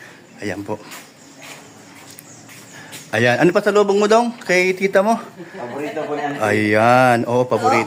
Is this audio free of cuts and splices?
yes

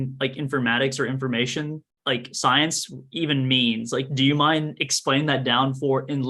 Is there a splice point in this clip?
no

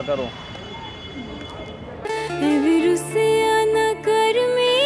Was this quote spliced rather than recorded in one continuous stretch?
no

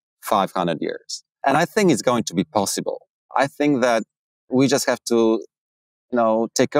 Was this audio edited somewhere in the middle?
yes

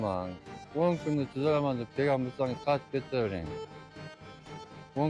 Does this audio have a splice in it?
no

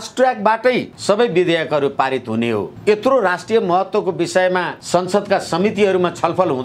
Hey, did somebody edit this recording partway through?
yes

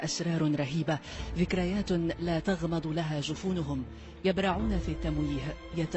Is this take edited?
no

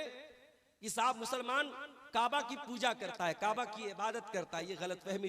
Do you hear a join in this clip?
no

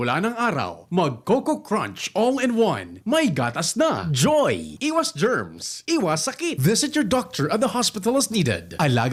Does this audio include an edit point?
no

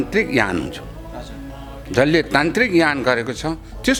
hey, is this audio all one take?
yes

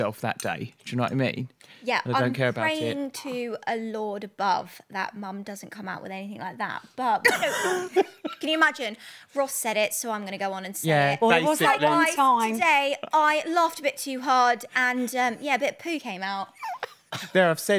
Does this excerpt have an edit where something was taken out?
no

